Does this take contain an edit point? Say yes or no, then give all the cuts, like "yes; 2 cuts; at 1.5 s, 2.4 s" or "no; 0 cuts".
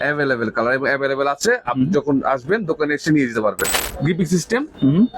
yes; 1 cut; at 3.8 s